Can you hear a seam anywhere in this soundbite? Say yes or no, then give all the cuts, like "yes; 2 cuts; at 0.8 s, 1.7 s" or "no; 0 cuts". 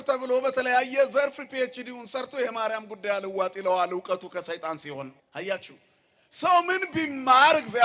yes; 1 cut; at 5.2 s